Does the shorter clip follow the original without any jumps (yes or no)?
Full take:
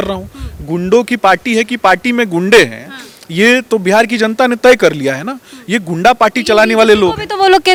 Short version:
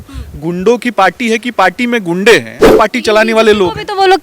no